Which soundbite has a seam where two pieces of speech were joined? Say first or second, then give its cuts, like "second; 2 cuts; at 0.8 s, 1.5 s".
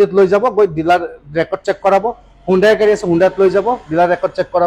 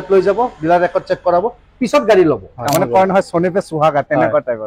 second; 1 cut; at 2.5 s